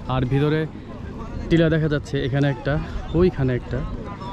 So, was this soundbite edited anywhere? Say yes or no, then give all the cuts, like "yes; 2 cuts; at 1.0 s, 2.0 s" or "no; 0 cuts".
no; 0 cuts